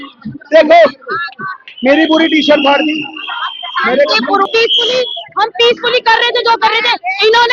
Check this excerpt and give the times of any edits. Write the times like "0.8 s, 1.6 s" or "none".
4.5 s